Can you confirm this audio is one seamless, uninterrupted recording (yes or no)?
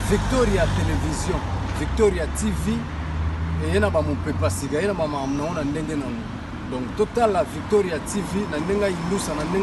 yes